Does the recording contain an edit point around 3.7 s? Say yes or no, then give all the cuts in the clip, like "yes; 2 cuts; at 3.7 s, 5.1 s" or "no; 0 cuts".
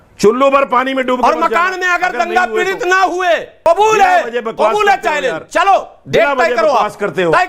yes; 1 cut; at 3.7 s